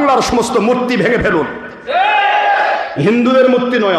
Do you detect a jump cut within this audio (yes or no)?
no